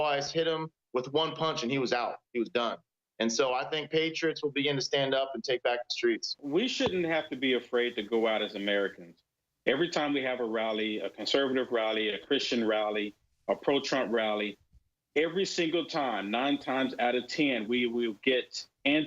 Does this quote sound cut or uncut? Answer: cut